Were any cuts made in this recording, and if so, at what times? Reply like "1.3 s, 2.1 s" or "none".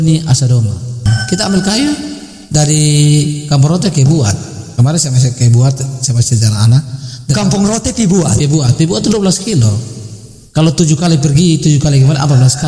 1.1 s